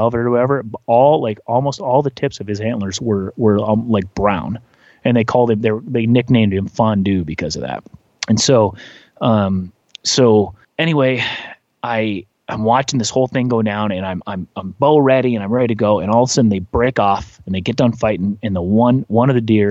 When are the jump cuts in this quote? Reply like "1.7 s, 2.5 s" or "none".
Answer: none